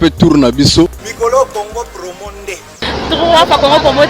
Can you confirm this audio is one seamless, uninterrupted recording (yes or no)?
no